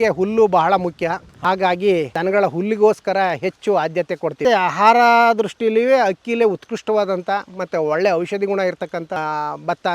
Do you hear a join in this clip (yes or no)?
yes